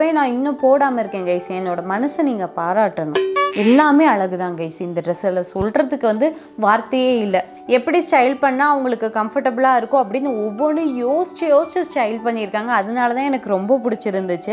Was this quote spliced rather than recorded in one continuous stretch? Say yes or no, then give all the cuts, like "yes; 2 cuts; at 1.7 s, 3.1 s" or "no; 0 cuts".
yes; 2 cuts; at 3.3 s, 7.6 s